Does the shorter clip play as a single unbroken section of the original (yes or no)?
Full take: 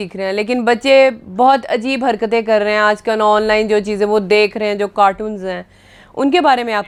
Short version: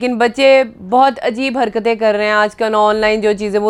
yes